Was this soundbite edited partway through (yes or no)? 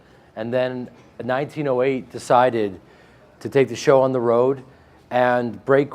yes